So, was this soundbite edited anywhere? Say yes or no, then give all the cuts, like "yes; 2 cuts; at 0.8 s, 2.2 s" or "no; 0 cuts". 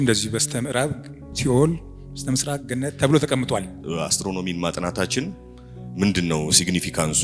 yes; 1 cut; at 3.7 s